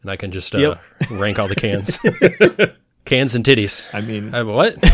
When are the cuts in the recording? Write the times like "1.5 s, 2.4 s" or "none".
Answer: 2.9 s